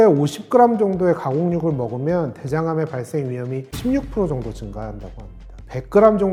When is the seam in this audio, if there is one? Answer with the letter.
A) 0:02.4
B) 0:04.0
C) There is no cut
C